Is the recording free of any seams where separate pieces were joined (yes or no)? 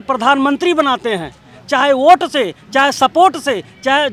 yes